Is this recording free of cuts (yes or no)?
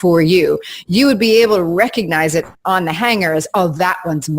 no